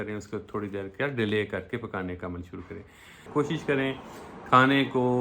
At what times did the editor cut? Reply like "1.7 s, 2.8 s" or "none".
3.2 s